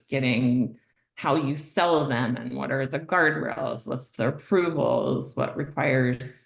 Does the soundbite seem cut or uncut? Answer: uncut